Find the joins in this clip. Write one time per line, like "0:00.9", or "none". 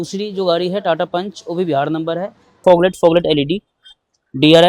0:02.6